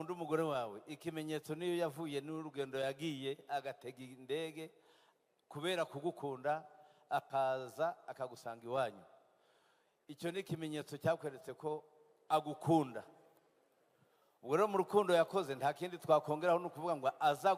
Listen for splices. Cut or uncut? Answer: uncut